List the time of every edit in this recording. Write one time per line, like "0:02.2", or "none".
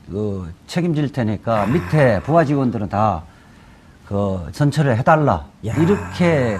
0:01.7